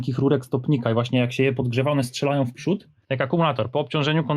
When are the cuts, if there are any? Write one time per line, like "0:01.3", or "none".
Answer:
0:03.0